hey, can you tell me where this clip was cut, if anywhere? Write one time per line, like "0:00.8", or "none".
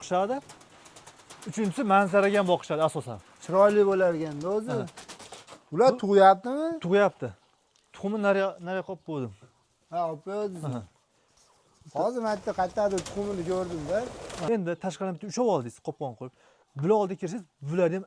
0:14.5